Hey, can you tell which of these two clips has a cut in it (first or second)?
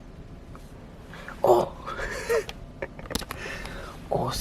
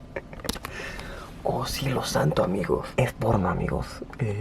second